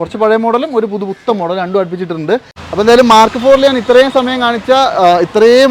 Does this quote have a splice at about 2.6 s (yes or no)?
yes